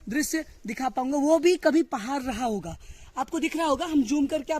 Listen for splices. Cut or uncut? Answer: uncut